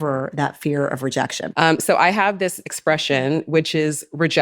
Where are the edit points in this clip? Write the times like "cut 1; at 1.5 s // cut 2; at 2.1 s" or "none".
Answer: cut 1; at 1.5 s